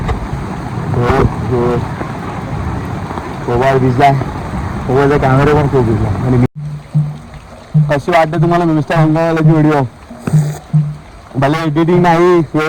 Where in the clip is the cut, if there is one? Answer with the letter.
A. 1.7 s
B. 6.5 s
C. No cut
B